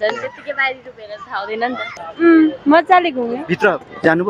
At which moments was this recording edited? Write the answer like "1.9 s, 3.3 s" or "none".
1.8 s